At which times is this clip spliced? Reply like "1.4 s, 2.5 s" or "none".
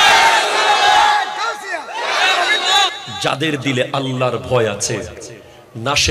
3.0 s